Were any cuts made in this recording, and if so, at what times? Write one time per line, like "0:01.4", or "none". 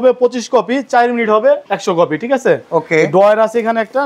0:01.7